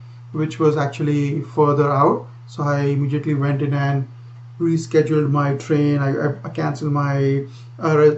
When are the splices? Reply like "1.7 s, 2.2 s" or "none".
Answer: none